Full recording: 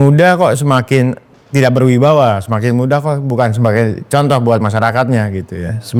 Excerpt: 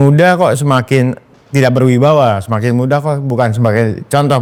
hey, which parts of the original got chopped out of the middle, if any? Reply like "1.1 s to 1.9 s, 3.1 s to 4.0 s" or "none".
none